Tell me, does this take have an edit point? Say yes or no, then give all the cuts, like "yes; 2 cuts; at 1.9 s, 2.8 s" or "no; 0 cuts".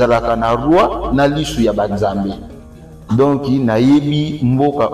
yes; 1 cut; at 2.3 s